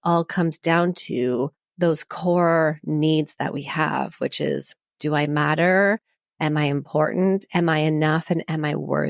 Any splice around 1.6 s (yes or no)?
yes